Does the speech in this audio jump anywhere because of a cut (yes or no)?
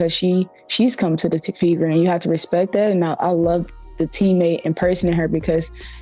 yes